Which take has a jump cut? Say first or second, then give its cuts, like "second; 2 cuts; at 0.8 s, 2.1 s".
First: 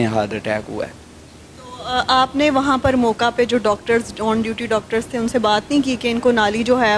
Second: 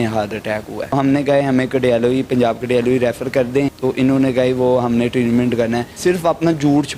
second; 3 cuts; at 0.9 s, 3.8 s, 5.9 s